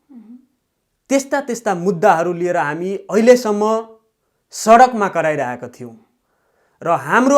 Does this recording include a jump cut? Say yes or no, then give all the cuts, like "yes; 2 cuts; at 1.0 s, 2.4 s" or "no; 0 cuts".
no; 0 cuts